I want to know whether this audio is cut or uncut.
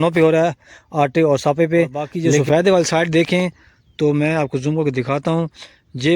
cut